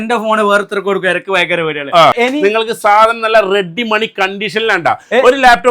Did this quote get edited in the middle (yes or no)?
yes